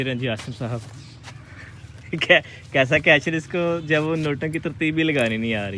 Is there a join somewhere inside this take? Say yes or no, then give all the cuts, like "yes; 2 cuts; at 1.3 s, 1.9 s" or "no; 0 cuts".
no; 0 cuts